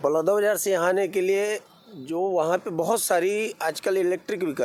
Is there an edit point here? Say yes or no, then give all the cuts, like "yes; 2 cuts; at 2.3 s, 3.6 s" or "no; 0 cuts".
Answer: no; 0 cuts